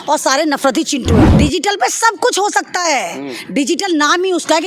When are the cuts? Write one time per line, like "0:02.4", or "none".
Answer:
0:01.3